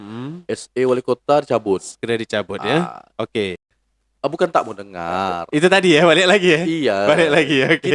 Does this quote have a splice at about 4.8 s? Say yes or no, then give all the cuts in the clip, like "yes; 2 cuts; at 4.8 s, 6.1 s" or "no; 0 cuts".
no; 1 cut; at 3.6 s